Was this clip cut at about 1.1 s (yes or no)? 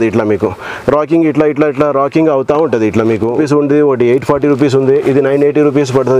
no